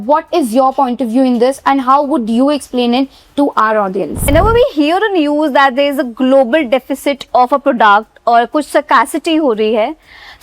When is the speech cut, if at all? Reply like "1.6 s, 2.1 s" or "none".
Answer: 4.3 s